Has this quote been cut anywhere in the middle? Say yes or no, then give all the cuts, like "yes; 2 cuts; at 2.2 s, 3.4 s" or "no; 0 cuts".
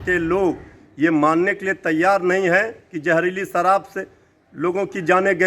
no; 0 cuts